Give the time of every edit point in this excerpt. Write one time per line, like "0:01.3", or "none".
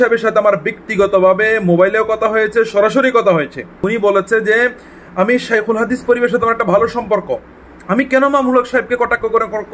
0:03.8